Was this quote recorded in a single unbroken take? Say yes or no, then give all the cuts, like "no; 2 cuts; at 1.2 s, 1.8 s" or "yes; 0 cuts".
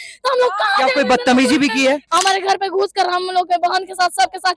no; 1 cut; at 2.1 s